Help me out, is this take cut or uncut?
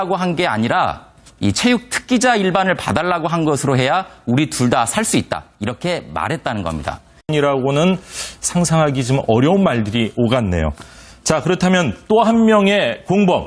uncut